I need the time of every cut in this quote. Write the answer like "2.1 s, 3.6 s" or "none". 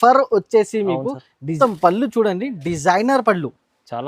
1.5 s